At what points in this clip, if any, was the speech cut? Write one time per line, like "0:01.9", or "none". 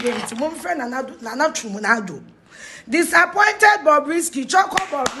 none